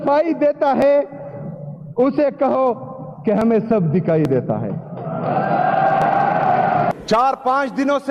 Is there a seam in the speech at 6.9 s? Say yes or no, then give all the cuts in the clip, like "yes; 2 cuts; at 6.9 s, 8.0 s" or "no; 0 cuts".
yes; 1 cut; at 6.9 s